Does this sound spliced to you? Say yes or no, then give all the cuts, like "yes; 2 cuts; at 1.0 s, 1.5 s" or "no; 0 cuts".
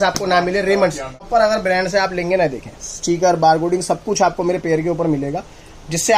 yes; 1 cut; at 1.3 s